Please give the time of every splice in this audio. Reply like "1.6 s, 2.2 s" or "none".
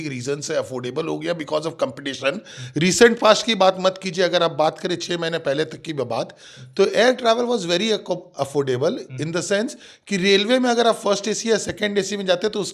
none